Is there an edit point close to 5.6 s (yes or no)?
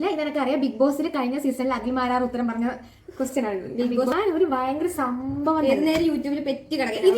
no